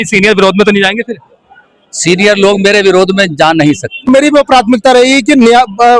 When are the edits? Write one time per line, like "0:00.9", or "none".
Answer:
0:04.1